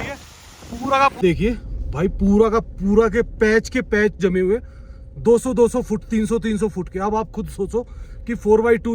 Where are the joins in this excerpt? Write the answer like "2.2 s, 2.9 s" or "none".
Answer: 1.2 s

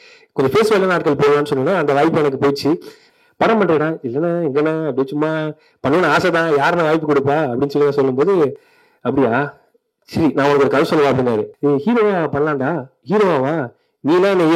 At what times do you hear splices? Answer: 3.0 s, 11.5 s

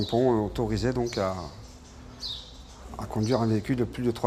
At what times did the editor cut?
none

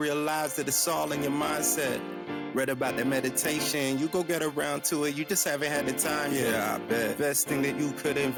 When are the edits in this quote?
none

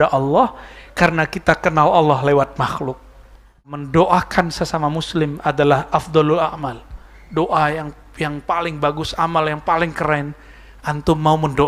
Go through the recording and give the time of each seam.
3.7 s

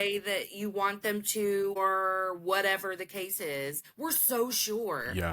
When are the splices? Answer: 1.8 s, 3.8 s

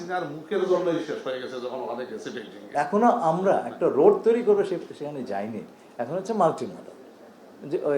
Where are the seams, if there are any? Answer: 2.6 s

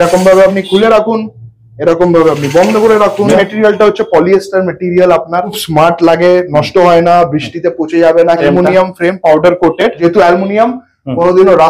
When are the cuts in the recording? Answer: 3.3 s, 5.6 s, 8.4 s, 10.0 s

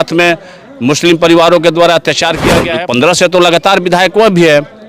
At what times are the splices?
2.6 s

